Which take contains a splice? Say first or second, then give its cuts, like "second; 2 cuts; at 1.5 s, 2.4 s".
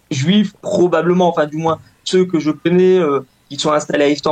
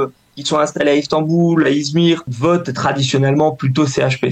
second; 1 cut; at 2.3 s